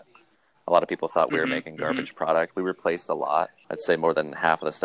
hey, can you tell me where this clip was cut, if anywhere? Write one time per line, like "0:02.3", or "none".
0:03.6